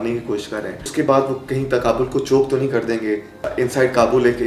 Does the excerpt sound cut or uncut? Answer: cut